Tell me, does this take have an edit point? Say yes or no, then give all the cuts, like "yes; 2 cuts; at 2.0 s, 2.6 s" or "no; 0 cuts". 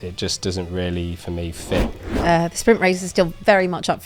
yes; 1 cut; at 2.1 s